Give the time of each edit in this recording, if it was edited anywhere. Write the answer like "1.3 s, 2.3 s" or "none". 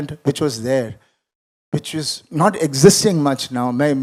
none